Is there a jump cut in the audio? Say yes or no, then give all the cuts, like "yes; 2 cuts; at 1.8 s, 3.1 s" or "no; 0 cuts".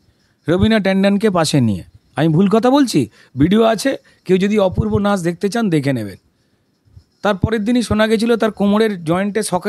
no; 0 cuts